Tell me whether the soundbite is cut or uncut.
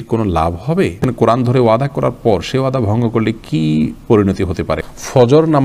cut